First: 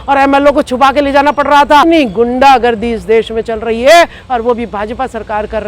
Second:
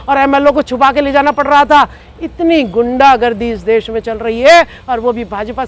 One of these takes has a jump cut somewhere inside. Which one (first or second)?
first